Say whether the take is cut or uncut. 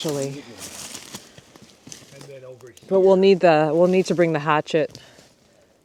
uncut